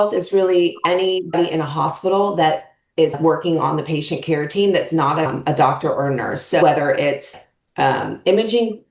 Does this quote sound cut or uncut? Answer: cut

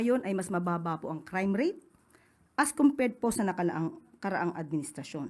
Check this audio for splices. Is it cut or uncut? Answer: uncut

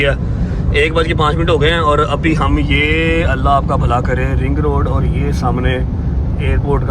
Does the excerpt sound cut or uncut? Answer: uncut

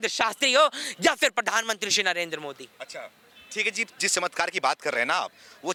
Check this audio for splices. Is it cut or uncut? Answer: uncut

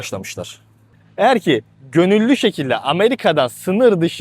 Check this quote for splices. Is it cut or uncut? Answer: cut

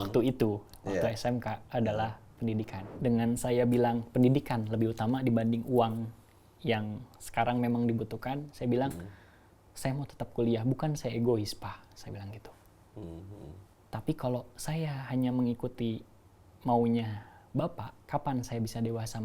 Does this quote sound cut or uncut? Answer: cut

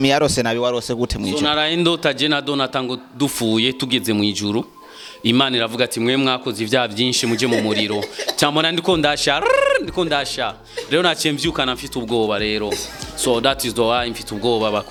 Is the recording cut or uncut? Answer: uncut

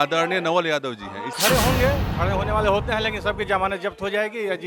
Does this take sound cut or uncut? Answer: cut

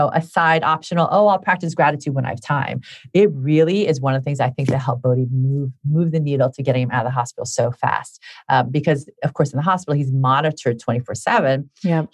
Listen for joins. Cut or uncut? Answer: uncut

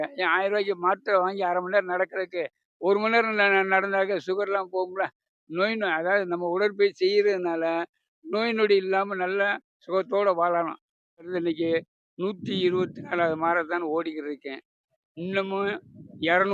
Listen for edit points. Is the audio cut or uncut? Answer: cut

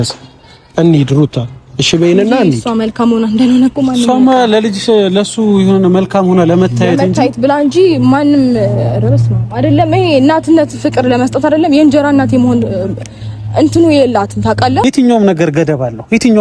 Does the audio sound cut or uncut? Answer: cut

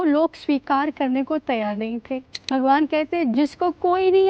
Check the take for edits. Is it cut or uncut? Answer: cut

